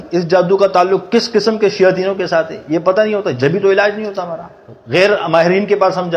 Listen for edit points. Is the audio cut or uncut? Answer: uncut